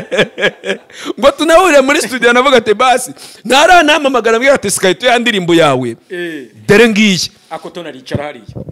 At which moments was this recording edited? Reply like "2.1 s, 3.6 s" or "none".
none